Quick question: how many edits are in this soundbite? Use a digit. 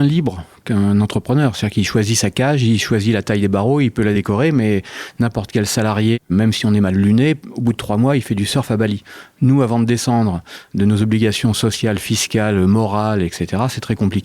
2